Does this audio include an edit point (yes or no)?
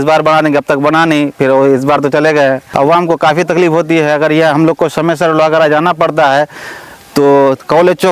yes